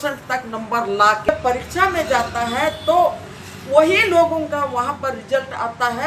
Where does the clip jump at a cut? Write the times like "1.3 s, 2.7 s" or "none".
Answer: 1.3 s

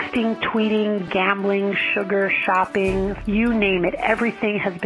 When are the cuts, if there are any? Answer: 1.1 s, 3.2 s

